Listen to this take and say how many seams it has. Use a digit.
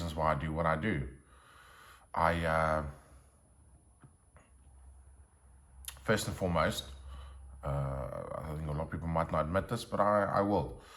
0